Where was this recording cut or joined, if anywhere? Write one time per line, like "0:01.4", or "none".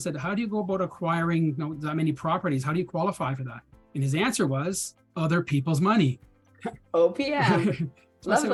none